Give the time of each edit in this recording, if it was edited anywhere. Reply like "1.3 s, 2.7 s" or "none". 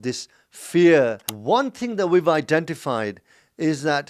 1.3 s